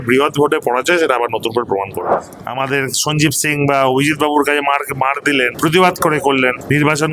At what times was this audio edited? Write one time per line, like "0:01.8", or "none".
0:02.1